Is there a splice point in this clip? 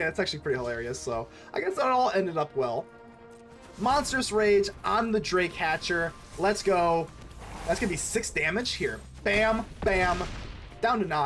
yes; 1 cut; at 3.7 s

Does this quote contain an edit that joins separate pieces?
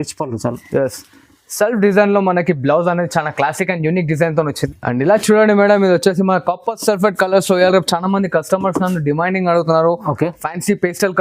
yes; 1 cut; at 4.7 s

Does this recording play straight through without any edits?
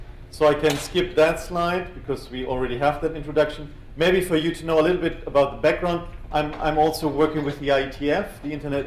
no; 1 cut; at 5.4 s

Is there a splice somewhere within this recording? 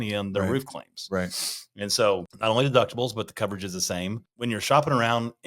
yes; 2 cuts; at 2.3 s, 4.3 s

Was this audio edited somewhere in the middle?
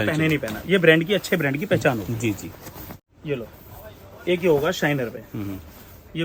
no; 0 cuts

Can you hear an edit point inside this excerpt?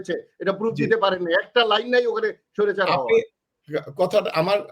no; 0 cuts

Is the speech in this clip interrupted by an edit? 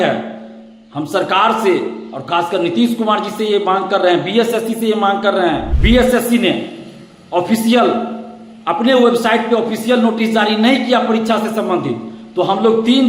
yes; 1 cut; at 5.7 s

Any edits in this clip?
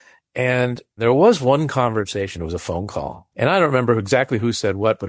yes; 2 cuts; at 1.0 s, 3.2 s

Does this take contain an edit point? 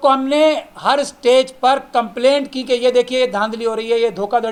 no; 0 cuts

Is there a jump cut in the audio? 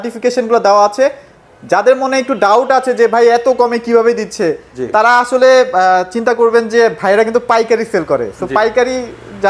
no; 0 cuts

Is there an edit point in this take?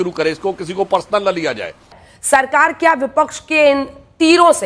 yes; 1 cut; at 2.1 s

